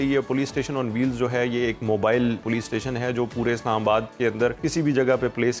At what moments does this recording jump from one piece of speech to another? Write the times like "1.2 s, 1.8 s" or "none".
2.4 s, 4.6 s